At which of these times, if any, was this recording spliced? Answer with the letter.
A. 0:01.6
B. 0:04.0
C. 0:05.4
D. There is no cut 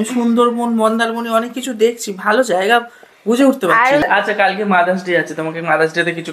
B